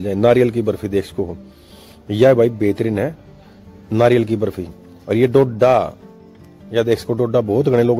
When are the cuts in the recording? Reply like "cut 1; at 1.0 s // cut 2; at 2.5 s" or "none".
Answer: none